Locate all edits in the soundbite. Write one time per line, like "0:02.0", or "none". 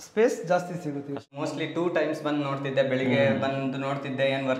0:01.2